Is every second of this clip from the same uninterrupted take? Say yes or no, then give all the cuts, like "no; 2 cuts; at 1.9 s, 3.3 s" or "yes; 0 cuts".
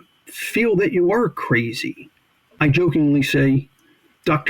no; 1 cut; at 2.4 s